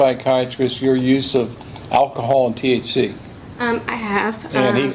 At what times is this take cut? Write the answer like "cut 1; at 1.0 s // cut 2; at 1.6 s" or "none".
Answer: none